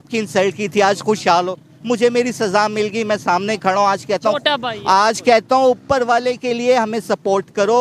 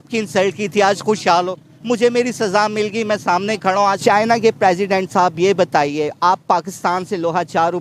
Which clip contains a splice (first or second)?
second